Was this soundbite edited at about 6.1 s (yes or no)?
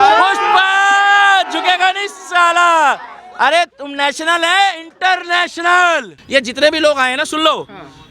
yes